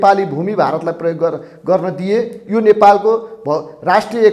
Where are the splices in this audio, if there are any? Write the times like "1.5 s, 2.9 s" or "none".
none